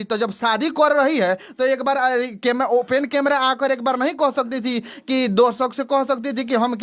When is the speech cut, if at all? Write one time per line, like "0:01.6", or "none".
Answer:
none